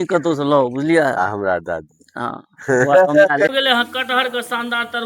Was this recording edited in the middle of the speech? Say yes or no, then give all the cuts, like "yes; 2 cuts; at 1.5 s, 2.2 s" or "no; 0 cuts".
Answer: yes; 1 cut; at 3.5 s